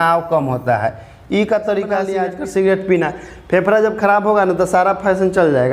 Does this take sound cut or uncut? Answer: cut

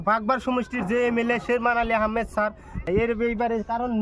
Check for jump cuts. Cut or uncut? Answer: cut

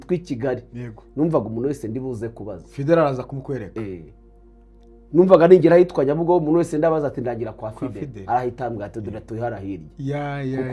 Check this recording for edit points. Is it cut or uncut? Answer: uncut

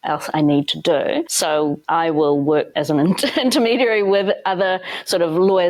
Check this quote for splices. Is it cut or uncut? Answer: uncut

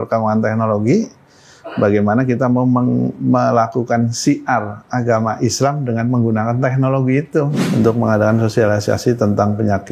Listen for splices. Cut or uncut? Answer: cut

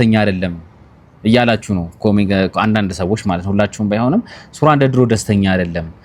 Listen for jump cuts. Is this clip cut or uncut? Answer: uncut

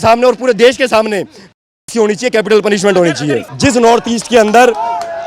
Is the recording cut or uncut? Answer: cut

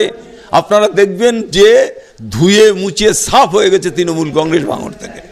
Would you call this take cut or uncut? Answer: uncut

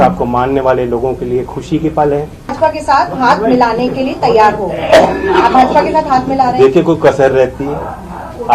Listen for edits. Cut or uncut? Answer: cut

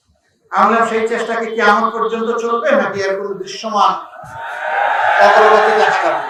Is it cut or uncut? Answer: uncut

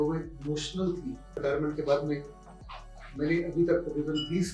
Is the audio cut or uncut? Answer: cut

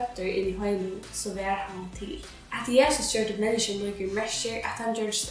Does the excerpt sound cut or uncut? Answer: cut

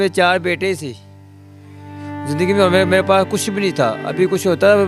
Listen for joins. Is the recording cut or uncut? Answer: uncut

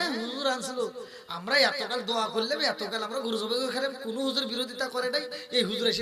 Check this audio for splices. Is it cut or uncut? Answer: uncut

